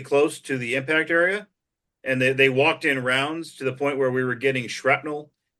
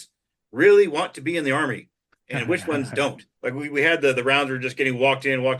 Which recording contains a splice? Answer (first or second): second